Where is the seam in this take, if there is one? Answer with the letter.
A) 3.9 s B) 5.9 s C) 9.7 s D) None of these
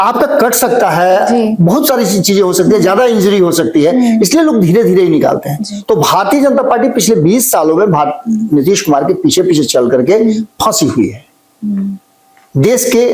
D